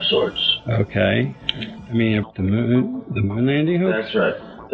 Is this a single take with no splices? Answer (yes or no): yes